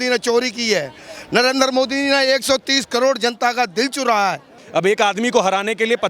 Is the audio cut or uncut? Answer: cut